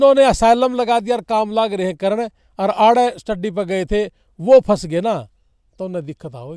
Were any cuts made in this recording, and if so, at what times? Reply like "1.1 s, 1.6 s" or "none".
none